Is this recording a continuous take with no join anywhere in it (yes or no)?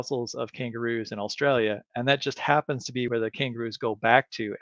no